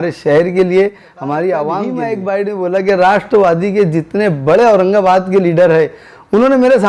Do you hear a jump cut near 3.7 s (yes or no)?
no